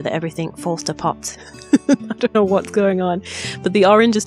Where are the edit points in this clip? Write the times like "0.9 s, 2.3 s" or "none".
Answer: none